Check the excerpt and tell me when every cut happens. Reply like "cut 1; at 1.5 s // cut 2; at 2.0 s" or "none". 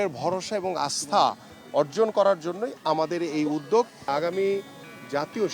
cut 1; at 4.1 s